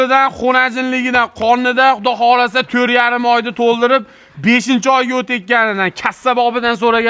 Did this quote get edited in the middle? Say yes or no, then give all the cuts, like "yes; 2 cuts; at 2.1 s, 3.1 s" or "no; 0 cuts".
no; 0 cuts